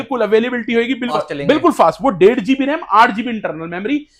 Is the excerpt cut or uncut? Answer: cut